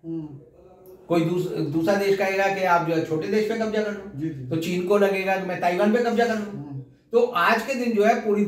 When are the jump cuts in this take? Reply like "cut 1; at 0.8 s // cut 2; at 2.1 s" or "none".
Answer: none